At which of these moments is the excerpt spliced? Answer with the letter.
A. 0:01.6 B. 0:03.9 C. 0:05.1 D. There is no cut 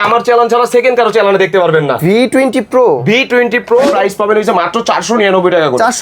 B